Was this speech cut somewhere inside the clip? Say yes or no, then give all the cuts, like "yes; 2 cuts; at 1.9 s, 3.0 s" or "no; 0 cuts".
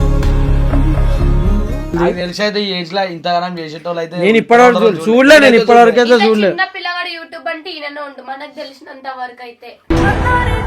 yes; 1 cut; at 1.9 s